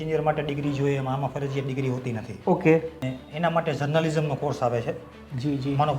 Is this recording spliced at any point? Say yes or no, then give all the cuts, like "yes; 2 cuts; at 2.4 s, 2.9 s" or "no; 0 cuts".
yes; 1 cut; at 3.1 s